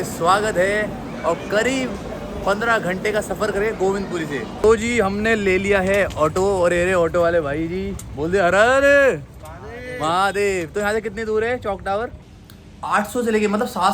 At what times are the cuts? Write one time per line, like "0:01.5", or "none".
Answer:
0:04.5
0:12.2